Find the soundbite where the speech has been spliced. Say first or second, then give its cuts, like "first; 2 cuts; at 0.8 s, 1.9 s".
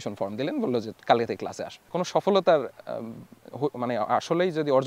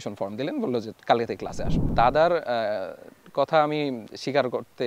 first; 1 cut; at 1.7 s